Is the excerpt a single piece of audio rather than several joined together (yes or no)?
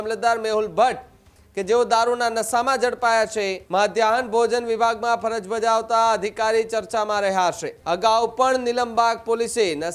no